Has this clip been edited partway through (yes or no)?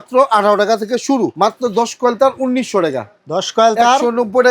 yes